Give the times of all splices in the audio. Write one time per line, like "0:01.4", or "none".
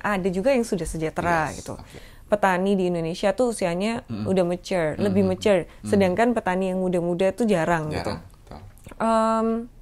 0:02.1